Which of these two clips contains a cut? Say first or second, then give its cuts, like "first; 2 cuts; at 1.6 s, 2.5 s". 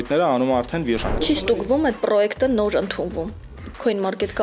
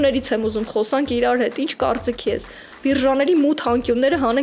first; 1 cut; at 1.2 s